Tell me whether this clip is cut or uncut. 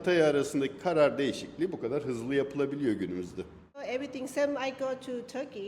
cut